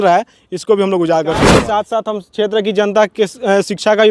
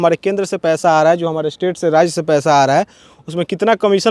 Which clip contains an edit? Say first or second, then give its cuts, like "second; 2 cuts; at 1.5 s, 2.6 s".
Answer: first; 1 cut; at 1.5 s